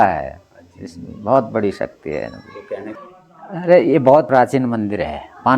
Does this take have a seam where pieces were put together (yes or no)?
yes